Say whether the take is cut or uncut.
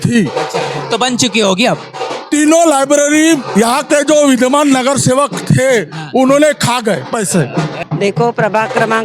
cut